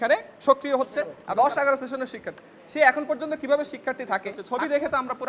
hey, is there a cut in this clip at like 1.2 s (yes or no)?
yes